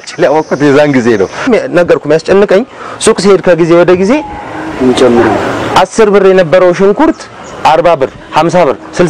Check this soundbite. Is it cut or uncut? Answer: cut